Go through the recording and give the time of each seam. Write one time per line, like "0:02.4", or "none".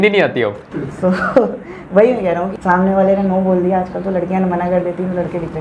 0:02.5